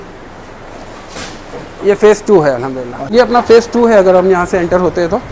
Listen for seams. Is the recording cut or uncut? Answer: cut